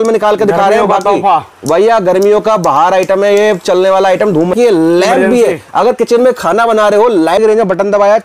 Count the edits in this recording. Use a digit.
2